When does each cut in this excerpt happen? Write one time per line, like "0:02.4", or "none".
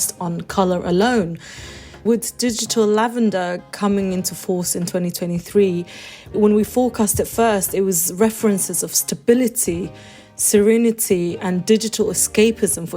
0:02.0
0:06.3

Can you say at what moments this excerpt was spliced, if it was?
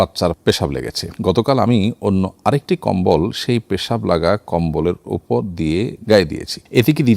none

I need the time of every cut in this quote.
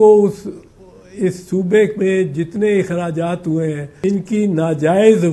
0:03.9

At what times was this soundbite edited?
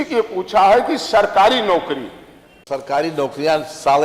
0:02.6

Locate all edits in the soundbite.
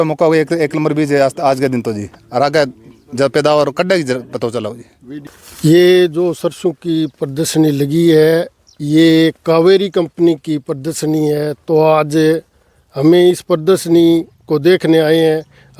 0:05.1

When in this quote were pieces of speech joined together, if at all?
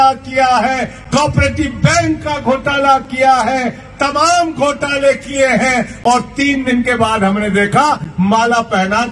none

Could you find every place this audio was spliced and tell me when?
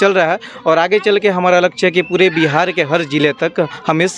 none

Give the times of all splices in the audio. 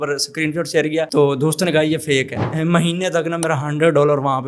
0:02.4

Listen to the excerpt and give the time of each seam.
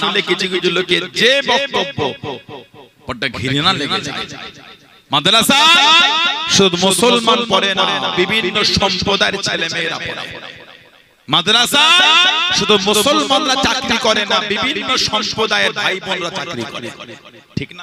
none

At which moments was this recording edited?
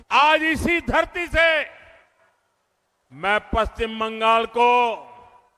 none

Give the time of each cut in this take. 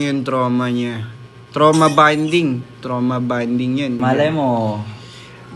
0:04.0

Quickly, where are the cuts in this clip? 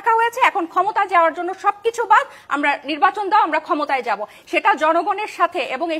none

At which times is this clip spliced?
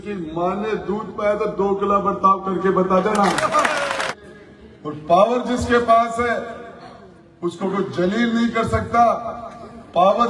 0:04.1

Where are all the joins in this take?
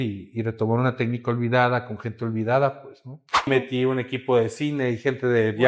0:03.5

